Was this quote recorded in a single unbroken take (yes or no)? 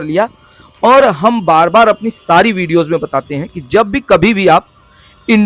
yes